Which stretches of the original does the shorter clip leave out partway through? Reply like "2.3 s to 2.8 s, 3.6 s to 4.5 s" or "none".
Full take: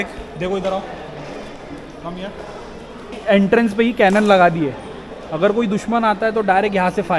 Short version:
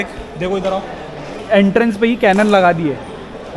1.4 s to 3.1 s